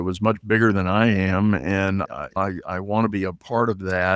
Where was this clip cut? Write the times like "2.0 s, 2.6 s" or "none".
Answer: 2.2 s